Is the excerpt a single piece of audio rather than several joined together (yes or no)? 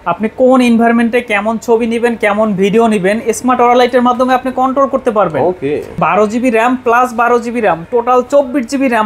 no